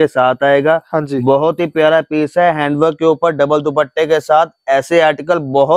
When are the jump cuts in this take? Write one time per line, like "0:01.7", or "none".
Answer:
none